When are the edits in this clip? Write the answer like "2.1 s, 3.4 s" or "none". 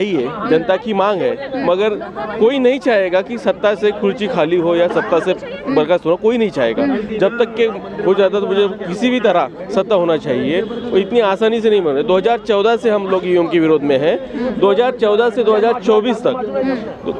none